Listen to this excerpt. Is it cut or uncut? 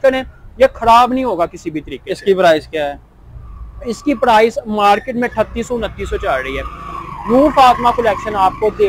uncut